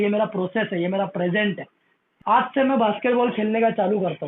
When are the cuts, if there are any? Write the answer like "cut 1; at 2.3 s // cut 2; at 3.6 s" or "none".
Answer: cut 1; at 2.0 s

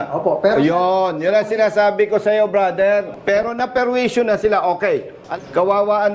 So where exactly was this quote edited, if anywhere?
cut 1; at 3.1 s // cut 2; at 5.1 s

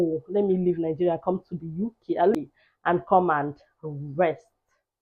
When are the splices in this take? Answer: cut 1; at 2.3 s

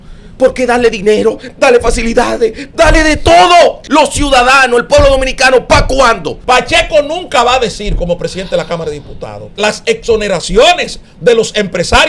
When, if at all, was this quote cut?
cut 1; at 3.8 s // cut 2; at 6.3 s // cut 3; at 9.5 s

